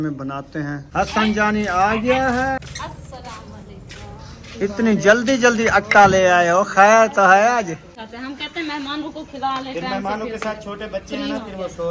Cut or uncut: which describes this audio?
cut